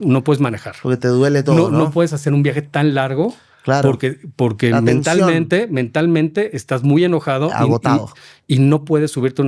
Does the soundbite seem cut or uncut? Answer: uncut